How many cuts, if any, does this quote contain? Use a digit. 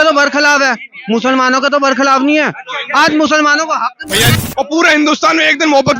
1